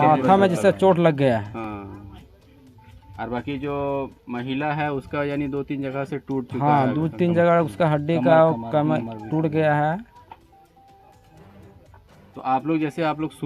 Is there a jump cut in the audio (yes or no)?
no